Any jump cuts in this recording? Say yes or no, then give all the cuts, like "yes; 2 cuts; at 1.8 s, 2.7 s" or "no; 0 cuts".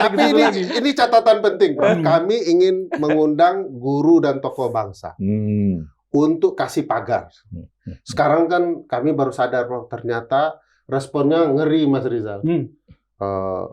no; 0 cuts